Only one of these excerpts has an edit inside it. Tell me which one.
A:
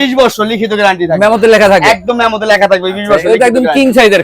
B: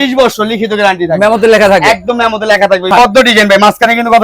B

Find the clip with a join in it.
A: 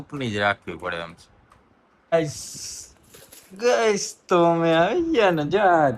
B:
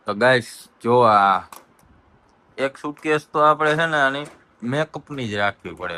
A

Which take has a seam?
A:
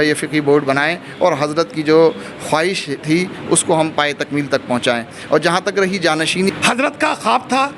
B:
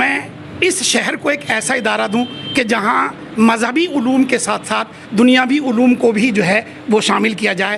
A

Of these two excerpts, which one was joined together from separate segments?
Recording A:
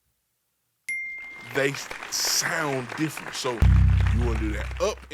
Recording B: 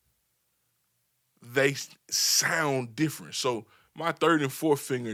A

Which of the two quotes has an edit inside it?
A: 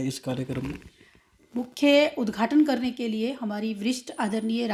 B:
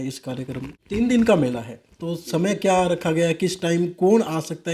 B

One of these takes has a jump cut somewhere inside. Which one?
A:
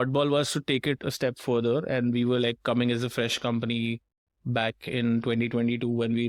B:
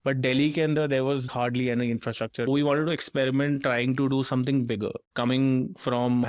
B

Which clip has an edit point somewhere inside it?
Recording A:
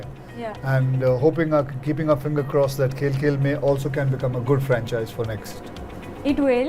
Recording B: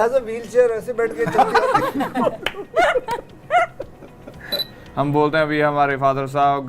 B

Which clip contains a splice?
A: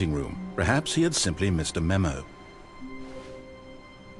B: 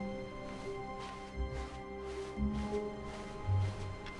A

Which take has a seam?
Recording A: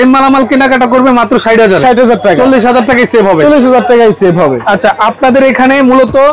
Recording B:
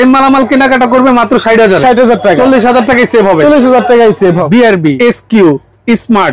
B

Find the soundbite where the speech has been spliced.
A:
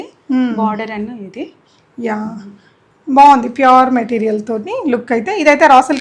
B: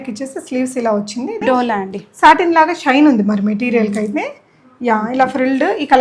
B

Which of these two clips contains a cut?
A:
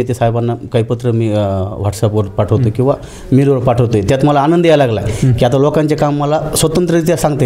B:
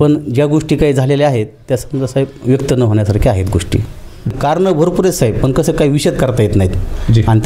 B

